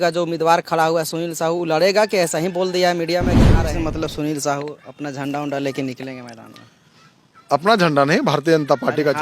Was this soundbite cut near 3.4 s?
yes; 1 cut; at 3.4 s

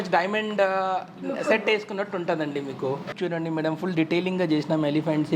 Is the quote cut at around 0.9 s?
no; 1 cut; at 3.1 s

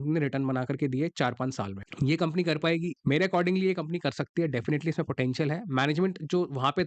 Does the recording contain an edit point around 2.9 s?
yes; 1 cut; at 2.9 s

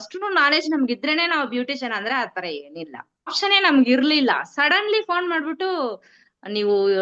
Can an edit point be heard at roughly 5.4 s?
no; 1 cut; at 3.3 s

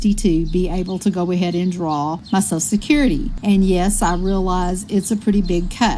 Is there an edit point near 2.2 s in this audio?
no; 0 cuts

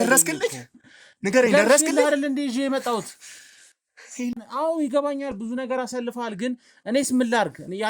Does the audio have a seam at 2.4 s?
no; 1 cut; at 4.4 s

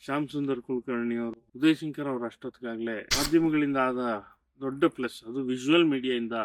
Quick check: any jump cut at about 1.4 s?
yes; 2 cuts; at 1.4 s, 3.1 s

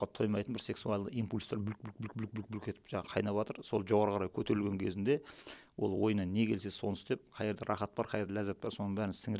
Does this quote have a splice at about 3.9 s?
no; 0 cuts

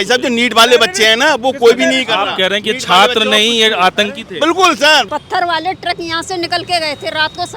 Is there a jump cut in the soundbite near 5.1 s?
yes; 1 cut; at 5.1 s

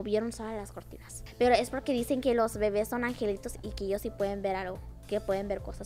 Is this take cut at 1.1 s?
yes; 1 cut; at 1.1 s

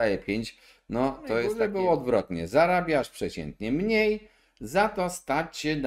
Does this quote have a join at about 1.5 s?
yes; 1 cut; at 1.5 s

